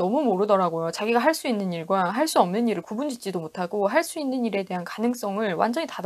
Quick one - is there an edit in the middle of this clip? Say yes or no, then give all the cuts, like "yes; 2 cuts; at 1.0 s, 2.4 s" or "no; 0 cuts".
no; 0 cuts